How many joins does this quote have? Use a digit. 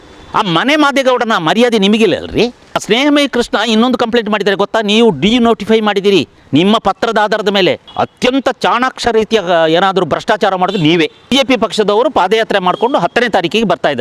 3